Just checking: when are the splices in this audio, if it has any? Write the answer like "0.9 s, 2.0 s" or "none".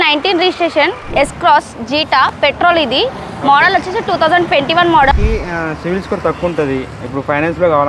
1.1 s, 5.1 s